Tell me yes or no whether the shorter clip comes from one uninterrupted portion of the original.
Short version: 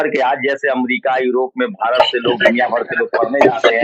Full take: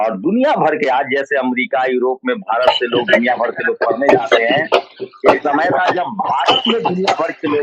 yes